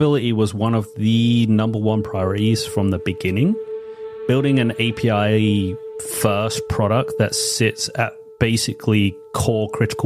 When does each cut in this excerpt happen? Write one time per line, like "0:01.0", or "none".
none